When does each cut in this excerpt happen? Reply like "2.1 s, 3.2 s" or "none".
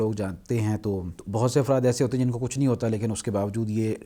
1.1 s